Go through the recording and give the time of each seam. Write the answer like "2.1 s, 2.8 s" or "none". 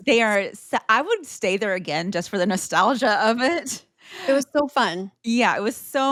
none